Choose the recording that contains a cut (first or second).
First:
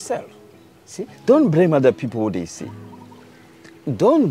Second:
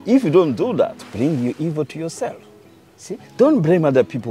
second